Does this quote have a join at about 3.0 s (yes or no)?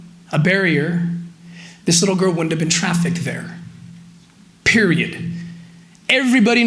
no